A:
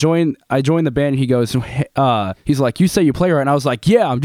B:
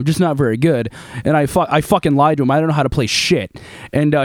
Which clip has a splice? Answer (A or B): A